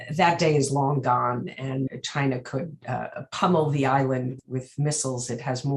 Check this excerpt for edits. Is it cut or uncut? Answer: cut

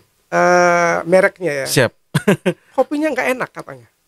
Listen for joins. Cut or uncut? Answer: uncut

